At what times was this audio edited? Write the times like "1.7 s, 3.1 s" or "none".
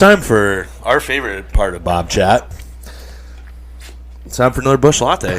2.5 s